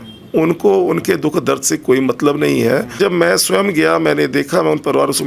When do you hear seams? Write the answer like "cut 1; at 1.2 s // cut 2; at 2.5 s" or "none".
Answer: cut 1; at 2.9 s